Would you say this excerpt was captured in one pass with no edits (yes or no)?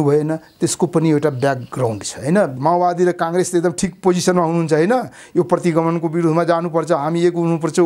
no